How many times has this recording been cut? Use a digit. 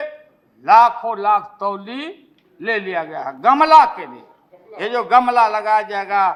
0